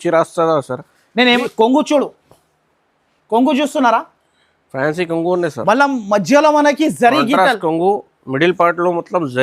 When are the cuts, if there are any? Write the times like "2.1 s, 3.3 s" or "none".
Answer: 1.4 s